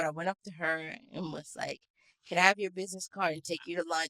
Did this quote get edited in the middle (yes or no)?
no